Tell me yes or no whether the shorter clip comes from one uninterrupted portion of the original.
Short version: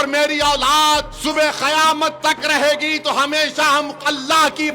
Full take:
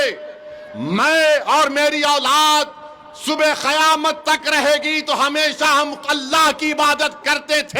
no